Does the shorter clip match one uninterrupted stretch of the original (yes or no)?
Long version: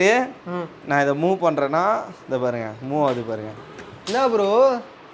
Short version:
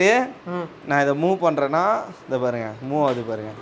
yes